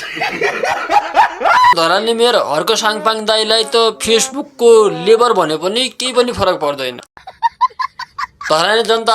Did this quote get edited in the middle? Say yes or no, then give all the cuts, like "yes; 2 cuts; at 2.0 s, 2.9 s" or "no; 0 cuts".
yes; 1 cut; at 1.7 s